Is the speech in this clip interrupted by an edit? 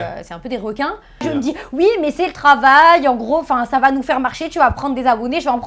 yes; 1 cut; at 1.2 s

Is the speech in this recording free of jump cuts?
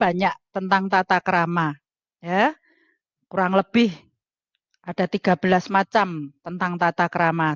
yes; 0 cuts

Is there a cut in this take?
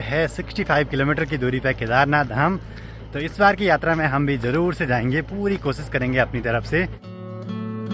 no; 0 cuts

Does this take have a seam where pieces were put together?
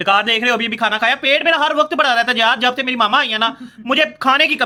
no; 0 cuts

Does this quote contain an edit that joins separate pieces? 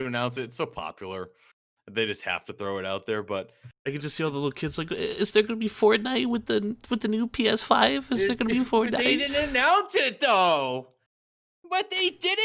no; 0 cuts

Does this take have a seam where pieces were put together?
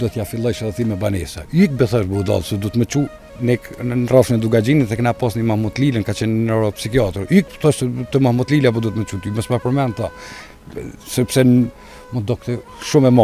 no; 0 cuts

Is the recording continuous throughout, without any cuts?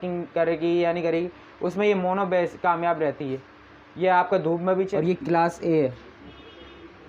no; 1 cut; at 4.9 s

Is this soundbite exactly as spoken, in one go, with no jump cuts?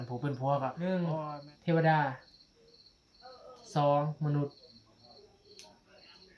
no; 1 cut; at 1.0 s

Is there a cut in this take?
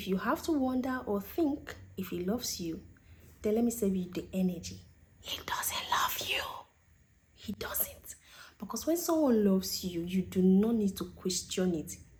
no; 0 cuts

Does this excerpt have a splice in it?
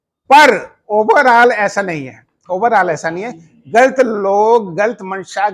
no; 0 cuts

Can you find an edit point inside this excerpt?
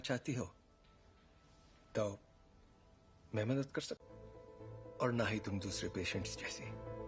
no; 0 cuts

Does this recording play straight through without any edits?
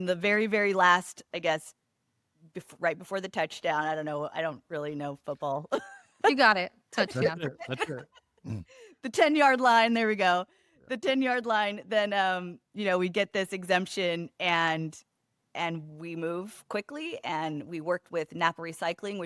yes; 0 cuts

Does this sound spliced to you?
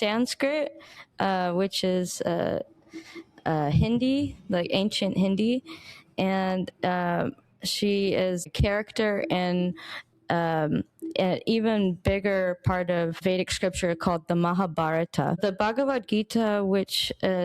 yes; 3 cuts; at 8.5 s, 13.2 s, 15.4 s

